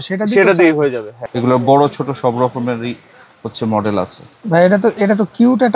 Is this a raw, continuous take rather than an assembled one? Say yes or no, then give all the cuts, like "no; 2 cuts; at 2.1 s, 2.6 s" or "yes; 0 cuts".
no; 1 cut; at 1.1 s